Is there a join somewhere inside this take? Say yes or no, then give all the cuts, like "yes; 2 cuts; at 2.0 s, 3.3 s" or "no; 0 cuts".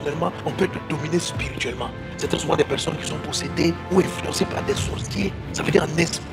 yes; 1 cut; at 2.1 s